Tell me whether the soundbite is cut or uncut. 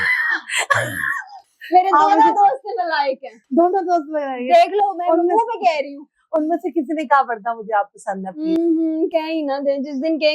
uncut